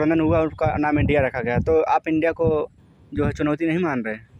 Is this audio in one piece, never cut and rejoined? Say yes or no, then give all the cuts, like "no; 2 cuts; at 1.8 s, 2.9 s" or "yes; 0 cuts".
yes; 0 cuts